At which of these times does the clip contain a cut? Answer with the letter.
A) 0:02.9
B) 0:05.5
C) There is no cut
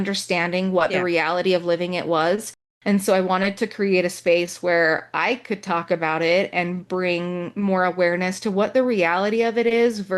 C